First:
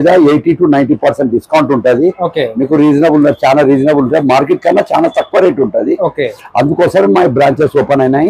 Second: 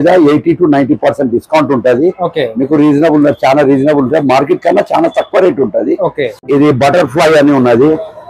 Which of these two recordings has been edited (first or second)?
second